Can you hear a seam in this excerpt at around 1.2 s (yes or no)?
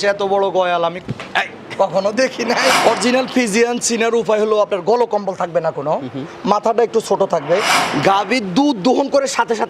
no